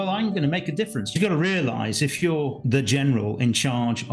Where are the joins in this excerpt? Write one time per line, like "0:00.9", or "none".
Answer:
0:01.1
0:02.6